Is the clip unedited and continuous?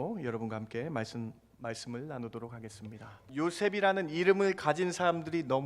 no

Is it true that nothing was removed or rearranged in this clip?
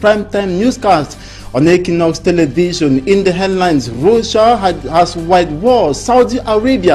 yes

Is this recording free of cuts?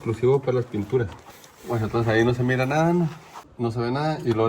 no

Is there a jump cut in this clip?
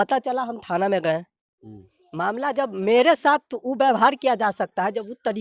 no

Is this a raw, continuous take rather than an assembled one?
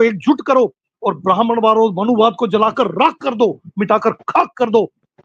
yes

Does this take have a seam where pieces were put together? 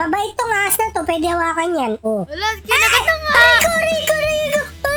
no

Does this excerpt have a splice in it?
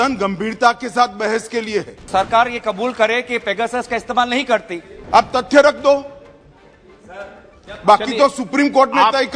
yes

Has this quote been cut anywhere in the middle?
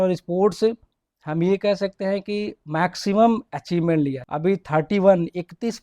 yes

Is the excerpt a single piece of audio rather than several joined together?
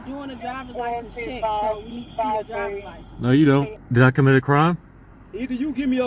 no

